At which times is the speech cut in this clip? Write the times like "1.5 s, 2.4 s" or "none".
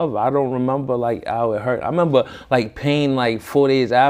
none